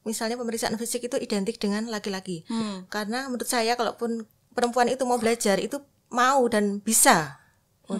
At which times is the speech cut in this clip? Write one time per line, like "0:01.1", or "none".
none